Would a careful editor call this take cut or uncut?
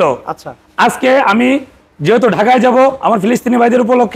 uncut